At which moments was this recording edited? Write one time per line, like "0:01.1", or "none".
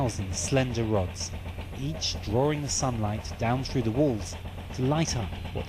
0:04.5